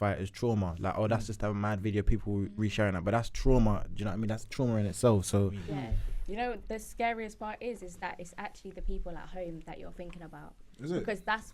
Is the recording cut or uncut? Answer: cut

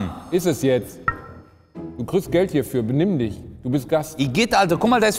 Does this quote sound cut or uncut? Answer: uncut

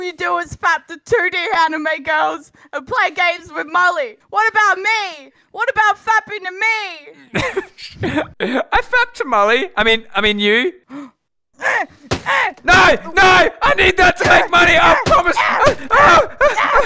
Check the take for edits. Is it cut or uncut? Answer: cut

